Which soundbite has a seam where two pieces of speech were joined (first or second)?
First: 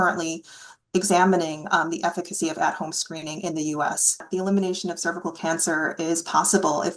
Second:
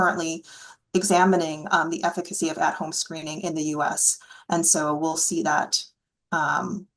first